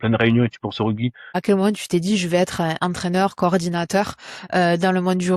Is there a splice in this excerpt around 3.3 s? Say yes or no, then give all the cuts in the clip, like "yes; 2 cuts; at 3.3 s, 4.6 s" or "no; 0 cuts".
no; 1 cut; at 1.4 s